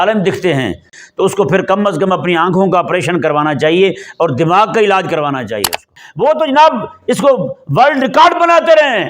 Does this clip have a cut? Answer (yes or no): yes